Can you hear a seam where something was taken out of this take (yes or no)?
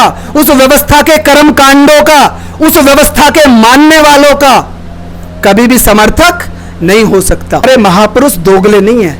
yes